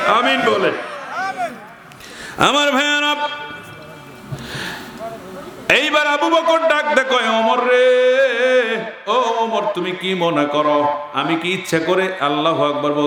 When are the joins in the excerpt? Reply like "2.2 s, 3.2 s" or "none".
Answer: none